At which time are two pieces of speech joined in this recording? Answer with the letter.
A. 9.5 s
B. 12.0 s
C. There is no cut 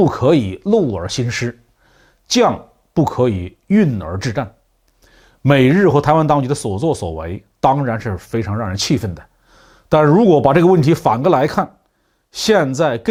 C